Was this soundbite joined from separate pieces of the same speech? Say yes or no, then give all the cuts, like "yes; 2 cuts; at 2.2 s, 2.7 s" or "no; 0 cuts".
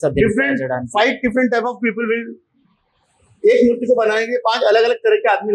no; 0 cuts